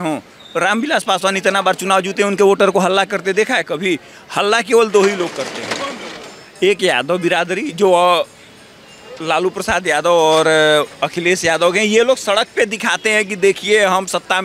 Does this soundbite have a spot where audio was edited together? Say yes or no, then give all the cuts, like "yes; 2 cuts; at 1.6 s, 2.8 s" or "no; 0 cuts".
no; 0 cuts